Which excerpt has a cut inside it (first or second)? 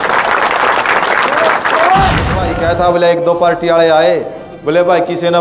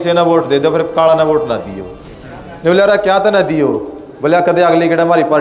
first